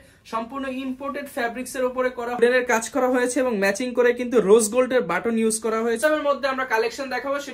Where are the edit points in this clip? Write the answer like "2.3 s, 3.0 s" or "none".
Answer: 2.4 s, 6.0 s

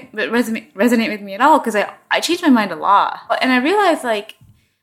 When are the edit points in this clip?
3.4 s

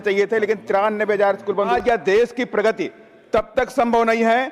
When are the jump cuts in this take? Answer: 1.7 s

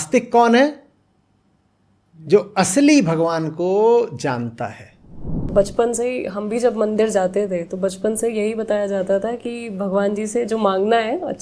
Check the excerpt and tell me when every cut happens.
5.5 s

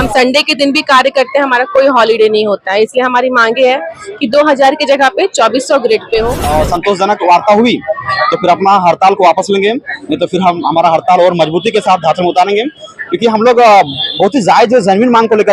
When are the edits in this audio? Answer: 6.4 s

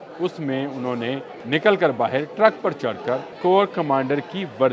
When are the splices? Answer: 1.3 s, 3.3 s

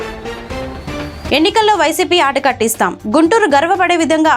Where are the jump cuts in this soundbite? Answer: 1.3 s

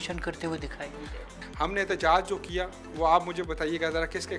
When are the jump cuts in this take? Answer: 1.2 s

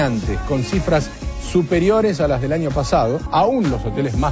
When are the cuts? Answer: 3.2 s

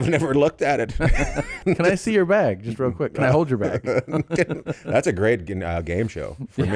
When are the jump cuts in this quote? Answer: 1.6 s

